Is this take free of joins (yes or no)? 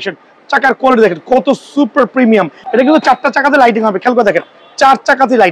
no